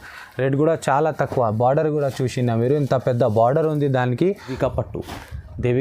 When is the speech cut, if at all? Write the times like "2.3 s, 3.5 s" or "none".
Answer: 4.5 s